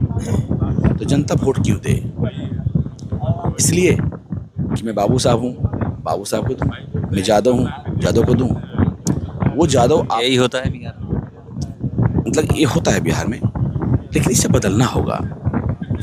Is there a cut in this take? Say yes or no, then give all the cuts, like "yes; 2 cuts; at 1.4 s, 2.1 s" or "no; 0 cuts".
no; 0 cuts